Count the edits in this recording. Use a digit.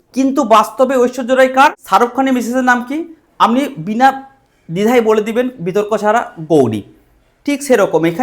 1